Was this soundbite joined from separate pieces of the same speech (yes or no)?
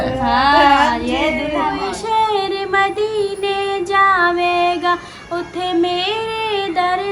yes